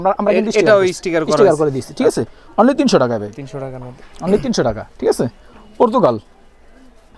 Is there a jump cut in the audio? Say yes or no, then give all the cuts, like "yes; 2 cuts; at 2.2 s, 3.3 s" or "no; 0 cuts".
no; 0 cuts